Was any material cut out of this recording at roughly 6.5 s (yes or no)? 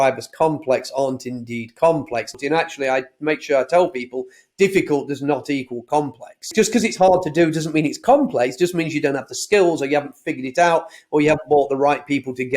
yes